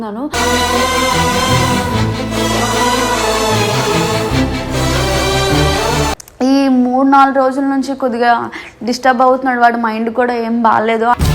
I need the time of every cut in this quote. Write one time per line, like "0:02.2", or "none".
0:06.2

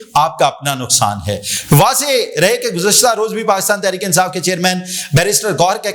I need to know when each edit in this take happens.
none

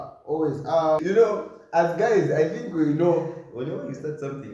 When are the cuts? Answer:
0:01.0

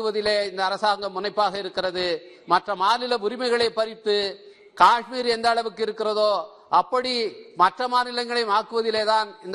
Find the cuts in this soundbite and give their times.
none

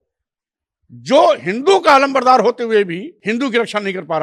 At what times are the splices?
0:03.1

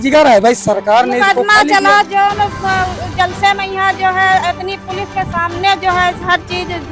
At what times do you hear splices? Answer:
none

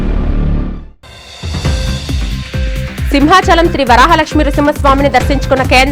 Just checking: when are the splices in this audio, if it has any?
0:02.9

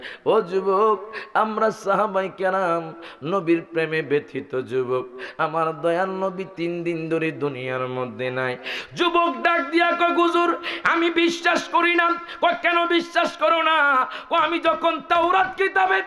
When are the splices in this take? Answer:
none

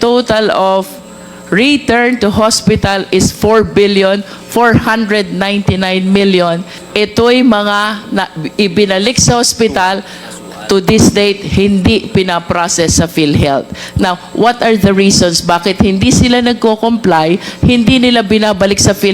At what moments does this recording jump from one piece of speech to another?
0:06.8

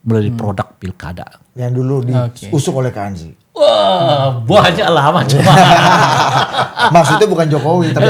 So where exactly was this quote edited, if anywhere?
none

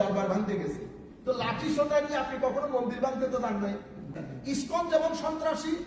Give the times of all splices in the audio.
0:04.3

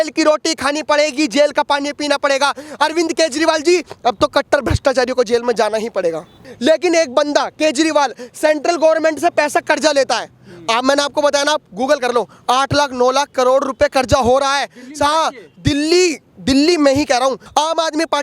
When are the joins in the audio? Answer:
0:06.5
0:17.4

